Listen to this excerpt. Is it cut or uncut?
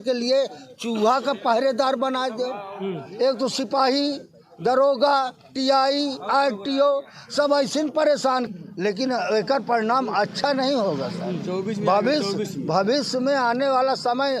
cut